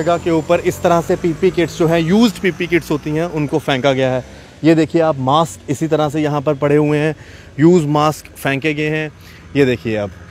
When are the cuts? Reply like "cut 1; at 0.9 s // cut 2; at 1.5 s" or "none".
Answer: none